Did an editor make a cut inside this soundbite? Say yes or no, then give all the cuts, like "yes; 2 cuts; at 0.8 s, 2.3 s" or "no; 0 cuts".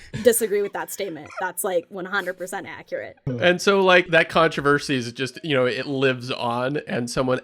yes; 2 cuts; at 3.2 s, 4.1 s